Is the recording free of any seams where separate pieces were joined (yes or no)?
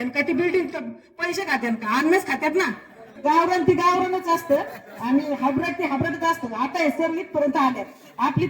no